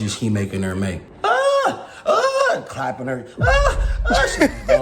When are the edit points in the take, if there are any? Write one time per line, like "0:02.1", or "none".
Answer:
0:01.1

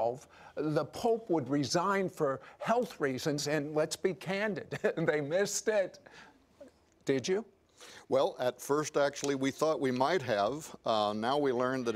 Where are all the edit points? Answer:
0:09.2

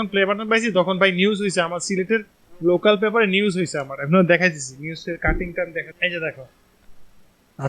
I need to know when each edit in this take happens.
0:05.9

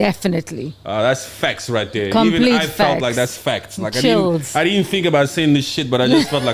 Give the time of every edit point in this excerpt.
none

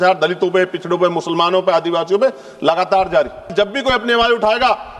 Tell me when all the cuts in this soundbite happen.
0:03.5

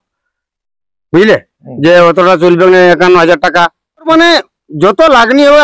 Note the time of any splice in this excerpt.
0:04.1

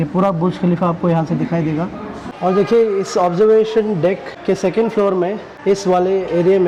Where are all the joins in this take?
none

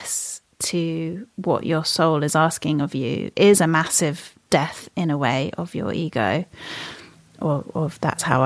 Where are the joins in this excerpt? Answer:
none

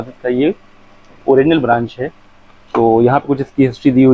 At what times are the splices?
none

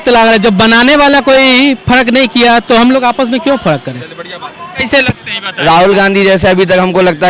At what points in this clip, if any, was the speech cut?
0:04.6

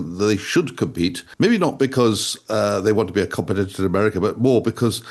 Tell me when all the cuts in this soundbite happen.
0:01.2

